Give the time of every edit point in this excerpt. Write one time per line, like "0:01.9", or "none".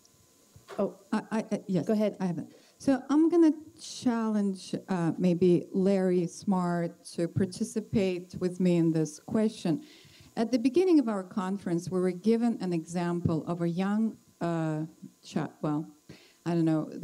0:11.8